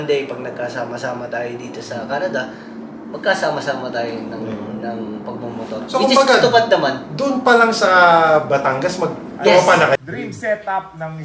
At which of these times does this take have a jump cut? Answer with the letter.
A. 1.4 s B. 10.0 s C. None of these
B